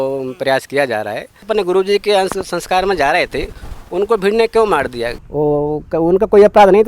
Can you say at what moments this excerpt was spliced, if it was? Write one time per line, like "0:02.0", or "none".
0:01.5
0:05.1